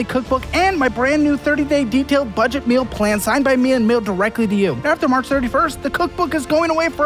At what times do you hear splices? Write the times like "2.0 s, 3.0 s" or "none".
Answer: none